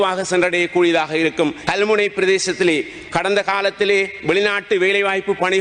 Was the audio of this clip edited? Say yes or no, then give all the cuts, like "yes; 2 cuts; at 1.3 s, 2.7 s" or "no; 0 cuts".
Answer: yes; 1 cut; at 1.6 s